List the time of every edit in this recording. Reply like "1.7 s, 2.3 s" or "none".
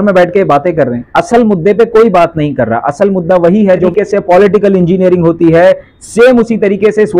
3.9 s